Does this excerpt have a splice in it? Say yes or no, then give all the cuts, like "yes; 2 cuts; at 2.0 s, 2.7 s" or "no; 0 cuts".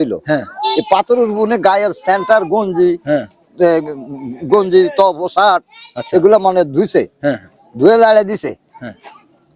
no; 0 cuts